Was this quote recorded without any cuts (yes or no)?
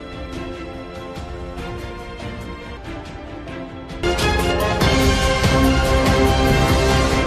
yes